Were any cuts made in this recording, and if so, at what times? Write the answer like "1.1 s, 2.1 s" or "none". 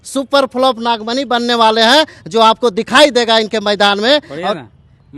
none